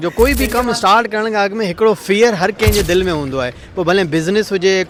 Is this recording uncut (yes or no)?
yes